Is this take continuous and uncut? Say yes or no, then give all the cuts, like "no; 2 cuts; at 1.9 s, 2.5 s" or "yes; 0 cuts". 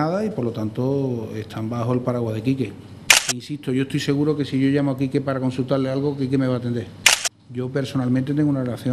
no; 1 cut; at 3.5 s